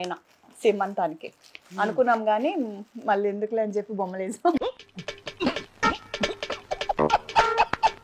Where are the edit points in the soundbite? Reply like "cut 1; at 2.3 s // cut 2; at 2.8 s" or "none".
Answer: none